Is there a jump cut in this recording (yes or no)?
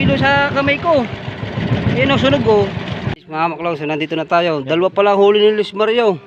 yes